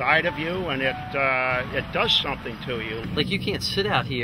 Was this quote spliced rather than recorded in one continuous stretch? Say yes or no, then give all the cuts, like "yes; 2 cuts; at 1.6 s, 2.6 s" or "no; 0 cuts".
yes; 1 cut; at 3.1 s